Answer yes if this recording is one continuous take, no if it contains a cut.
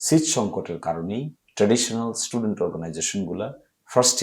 no